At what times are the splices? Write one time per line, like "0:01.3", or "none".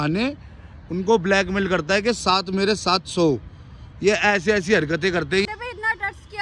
0:05.5